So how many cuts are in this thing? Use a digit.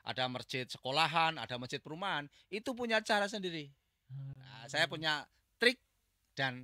0